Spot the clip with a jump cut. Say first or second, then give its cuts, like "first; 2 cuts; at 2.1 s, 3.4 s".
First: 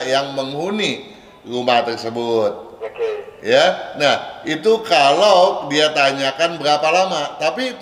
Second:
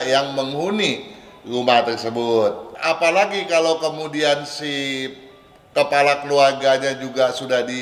second; 1 cut; at 2.7 s